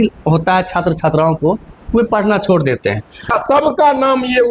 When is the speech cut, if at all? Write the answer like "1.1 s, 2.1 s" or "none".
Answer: 3.3 s